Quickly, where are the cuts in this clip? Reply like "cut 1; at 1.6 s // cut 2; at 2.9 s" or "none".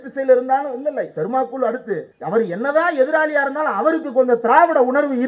cut 1; at 2.1 s